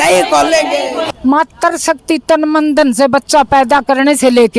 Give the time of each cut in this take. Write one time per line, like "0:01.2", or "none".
0:01.0